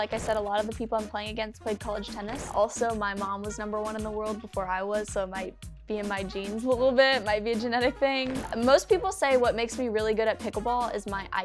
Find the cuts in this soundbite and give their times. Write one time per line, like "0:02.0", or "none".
0:02.5
0:08.5